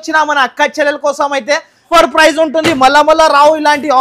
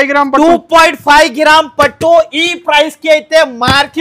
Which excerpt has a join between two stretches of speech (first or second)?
first